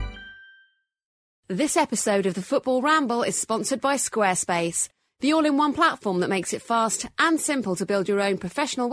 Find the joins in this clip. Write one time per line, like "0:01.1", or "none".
0:01.2